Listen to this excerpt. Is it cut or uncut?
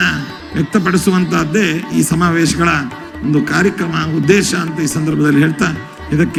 uncut